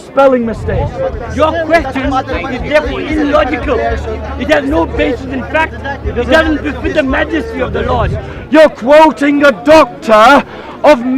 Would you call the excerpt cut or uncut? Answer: cut